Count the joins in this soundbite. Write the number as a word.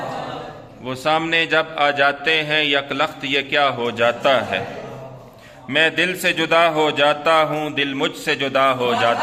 zero